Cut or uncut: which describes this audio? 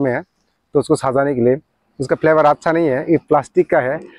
uncut